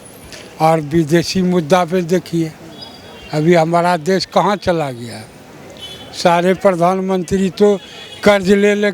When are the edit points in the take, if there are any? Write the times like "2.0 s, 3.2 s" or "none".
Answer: none